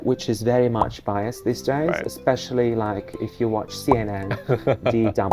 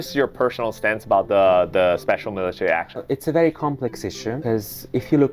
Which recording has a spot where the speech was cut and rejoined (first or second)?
second